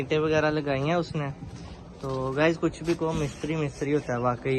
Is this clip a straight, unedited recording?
yes; 0 cuts

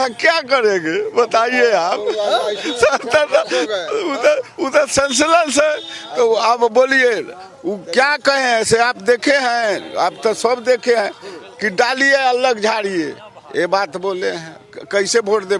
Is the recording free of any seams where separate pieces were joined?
yes; 0 cuts

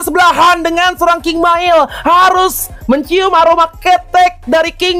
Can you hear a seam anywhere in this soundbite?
no; 0 cuts

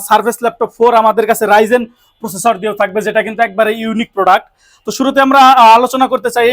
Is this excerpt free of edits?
yes; 0 cuts

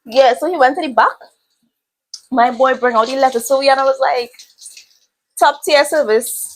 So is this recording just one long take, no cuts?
yes; 0 cuts

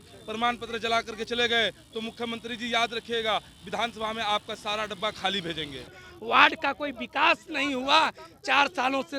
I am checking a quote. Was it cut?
yes; 1 cut; at 6.1 s

